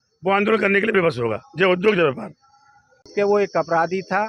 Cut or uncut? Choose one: cut